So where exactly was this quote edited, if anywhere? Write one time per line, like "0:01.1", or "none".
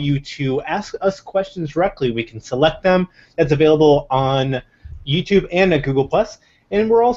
none